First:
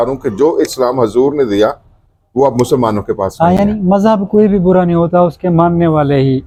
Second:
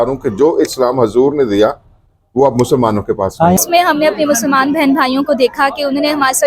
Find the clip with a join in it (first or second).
second